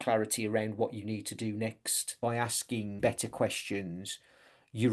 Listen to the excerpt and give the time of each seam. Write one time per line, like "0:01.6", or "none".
0:02.0
0:03.0

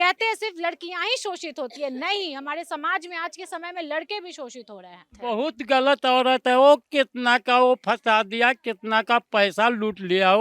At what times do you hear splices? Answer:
0:05.1

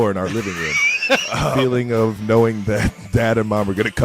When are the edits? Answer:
0:01.6

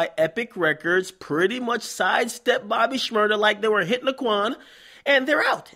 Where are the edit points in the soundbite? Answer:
0:01.9

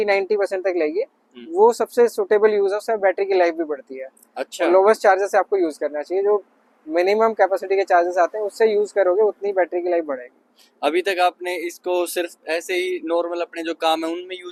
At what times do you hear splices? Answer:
none

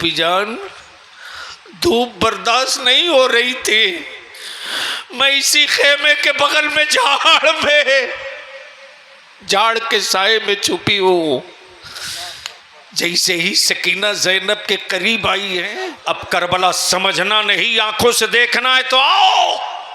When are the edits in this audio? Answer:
0:15.7

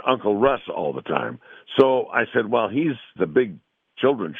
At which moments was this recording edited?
0:03.1

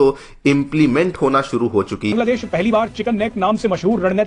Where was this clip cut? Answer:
0:02.1

